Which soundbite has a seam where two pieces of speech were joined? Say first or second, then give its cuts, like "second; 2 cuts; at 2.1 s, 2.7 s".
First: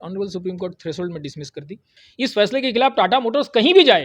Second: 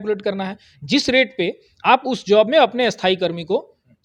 first; 1 cut; at 2.0 s